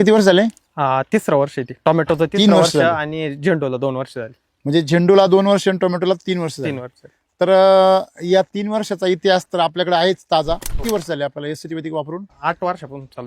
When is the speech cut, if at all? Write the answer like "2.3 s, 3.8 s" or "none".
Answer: 10.7 s, 12.3 s

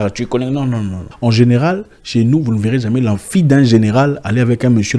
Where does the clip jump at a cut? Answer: 1.0 s

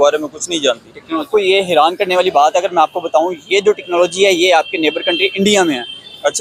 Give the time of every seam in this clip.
1.3 s

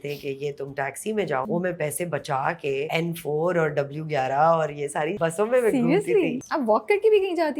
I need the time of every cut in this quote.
1.5 s, 2.9 s, 5.1 s, 6.4 s

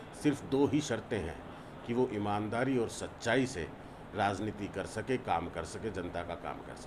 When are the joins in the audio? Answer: none

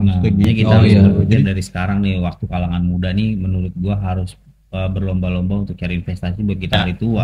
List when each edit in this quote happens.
1.4 s

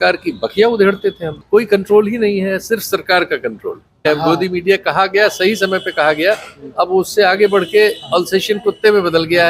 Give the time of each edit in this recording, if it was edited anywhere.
1.4 s, 4.1 s

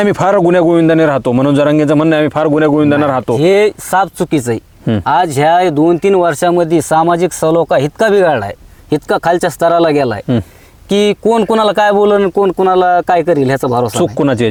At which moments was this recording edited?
none

